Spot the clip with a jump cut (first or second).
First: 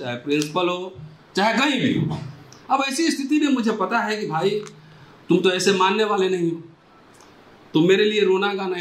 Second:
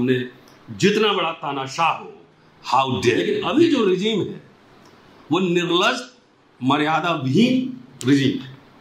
second